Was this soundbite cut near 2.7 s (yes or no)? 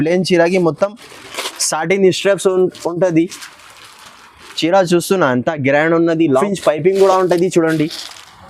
no